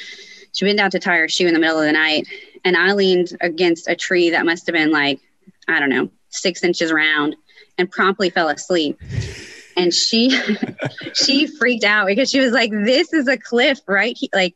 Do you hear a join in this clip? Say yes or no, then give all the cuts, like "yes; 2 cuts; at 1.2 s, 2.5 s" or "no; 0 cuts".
no; 0 cuts